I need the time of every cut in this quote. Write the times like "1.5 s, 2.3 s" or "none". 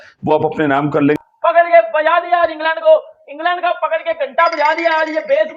1.2 s